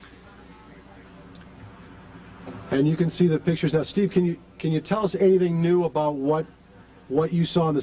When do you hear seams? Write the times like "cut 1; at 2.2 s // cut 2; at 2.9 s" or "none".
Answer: cut 1; at 1.0 s